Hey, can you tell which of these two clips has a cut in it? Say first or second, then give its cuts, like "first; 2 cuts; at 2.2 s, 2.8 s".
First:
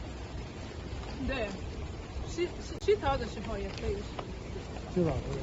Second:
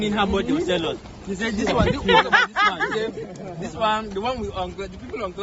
first; 1 cut; at 2.8 s